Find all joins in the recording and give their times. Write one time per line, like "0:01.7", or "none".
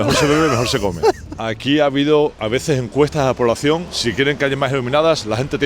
0:01.3
0:03.9